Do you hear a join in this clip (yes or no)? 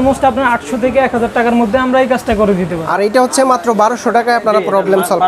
yes